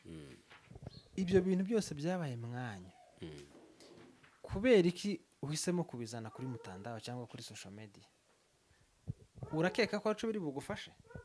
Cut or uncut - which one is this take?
uncut